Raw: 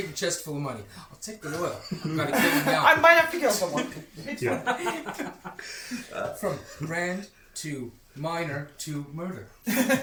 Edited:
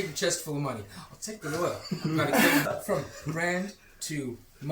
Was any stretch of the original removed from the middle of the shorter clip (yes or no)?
yes